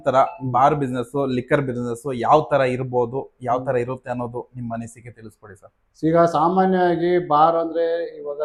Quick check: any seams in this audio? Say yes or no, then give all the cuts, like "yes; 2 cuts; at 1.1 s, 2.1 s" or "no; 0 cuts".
no; 0 cuts